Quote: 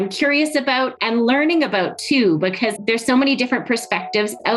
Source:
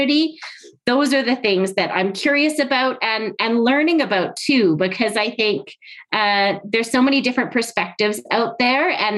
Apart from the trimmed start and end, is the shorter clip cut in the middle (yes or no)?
yes